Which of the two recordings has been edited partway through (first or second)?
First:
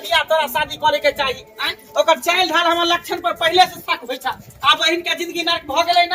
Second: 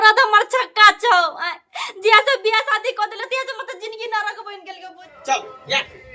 second